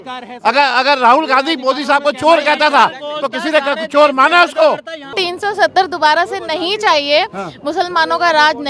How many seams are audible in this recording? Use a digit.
1